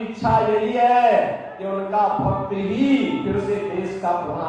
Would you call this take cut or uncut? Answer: uncut